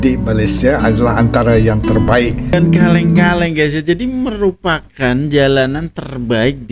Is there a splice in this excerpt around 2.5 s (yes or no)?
yes